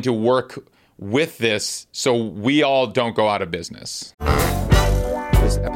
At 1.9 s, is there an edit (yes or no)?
no